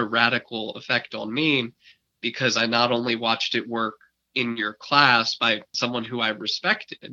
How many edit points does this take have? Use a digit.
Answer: 1